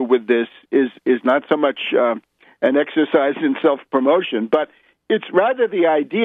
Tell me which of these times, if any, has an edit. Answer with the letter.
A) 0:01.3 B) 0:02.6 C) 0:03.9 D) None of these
A